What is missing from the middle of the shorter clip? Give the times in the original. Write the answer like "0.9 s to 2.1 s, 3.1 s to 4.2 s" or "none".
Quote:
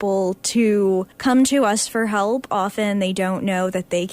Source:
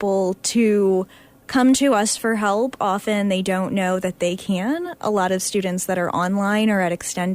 1.1 s to 1.4 s